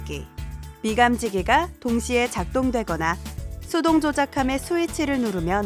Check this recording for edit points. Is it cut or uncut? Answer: uncut